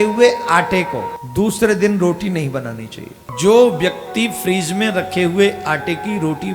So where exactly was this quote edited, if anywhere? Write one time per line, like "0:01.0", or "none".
0:01.2
0:03.2